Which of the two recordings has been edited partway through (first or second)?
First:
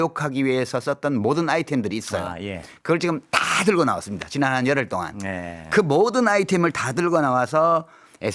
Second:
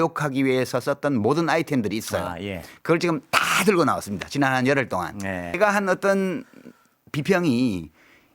second